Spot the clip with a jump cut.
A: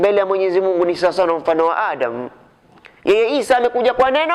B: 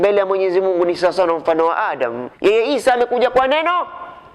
B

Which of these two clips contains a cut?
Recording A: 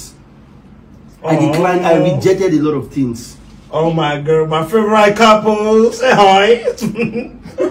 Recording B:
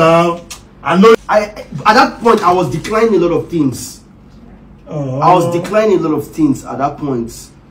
B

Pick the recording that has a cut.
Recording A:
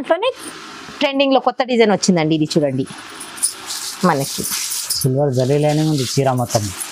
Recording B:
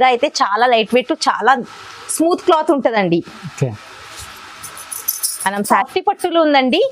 B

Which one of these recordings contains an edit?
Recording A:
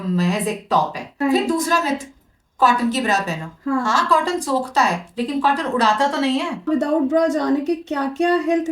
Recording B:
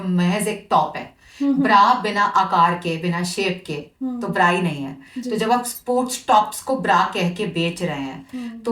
A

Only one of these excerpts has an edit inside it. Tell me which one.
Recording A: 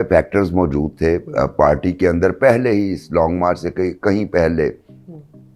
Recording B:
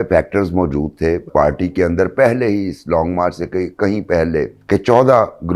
B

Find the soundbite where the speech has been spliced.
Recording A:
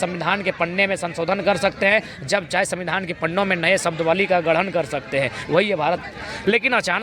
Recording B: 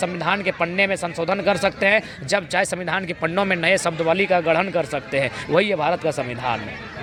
A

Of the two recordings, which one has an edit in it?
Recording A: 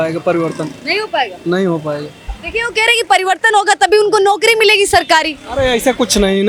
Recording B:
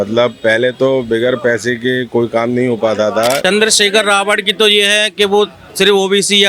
B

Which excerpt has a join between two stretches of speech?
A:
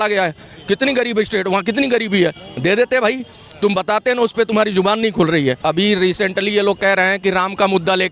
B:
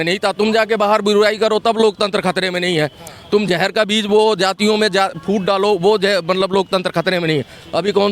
A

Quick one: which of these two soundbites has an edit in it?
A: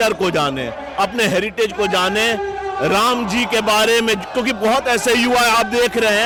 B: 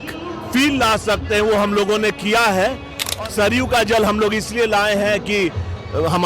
B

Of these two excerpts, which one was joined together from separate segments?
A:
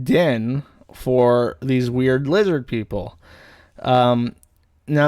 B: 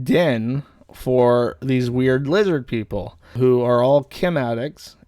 B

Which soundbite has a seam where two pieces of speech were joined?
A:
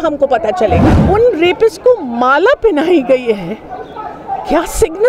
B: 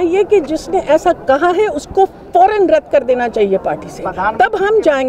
A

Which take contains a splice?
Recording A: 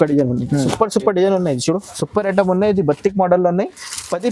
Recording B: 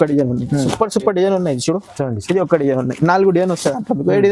A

